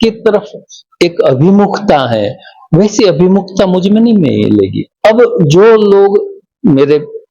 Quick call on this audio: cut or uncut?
uncut